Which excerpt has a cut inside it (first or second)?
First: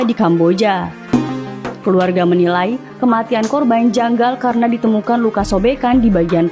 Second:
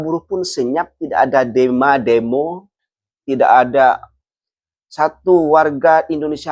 first